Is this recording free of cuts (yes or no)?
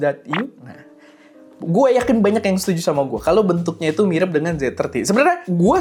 yes